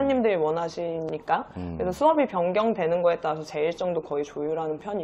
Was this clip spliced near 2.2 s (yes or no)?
no